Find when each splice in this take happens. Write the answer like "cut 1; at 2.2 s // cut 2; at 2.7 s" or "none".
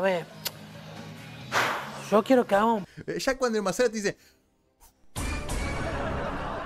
none